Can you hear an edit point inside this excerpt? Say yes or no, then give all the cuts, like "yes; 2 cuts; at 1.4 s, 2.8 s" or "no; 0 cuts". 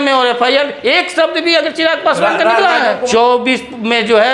yes; 1 cut; at 3.0 s